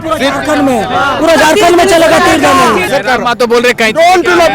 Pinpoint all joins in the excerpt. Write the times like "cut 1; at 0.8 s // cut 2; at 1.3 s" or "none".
cut 1; at 2.9 s